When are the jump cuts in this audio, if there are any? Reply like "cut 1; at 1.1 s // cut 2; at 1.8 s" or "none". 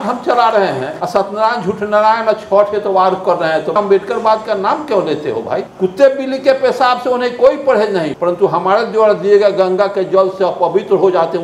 cut 1; at 0.9 s // cut 2; at 5.7 s // cut 3; at 8.1 s